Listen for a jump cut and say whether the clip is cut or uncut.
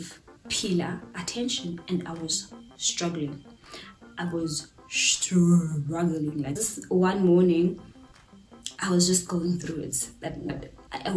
uncut